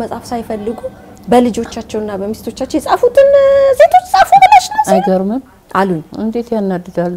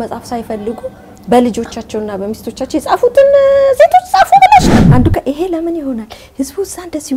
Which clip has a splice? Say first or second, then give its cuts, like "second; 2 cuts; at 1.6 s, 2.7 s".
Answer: second; 1 cut; at 4.7 s